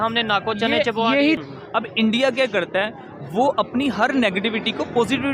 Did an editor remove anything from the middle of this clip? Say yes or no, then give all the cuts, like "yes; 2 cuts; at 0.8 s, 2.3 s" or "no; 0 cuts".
yes; 1 cut; at 1.4 s